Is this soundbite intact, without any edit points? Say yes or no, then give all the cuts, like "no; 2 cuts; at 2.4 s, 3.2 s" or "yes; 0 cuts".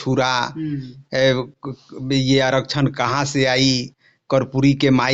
yes; 0 cuts